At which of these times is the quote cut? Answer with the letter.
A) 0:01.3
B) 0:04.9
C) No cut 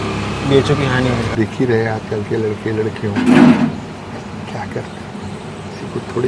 A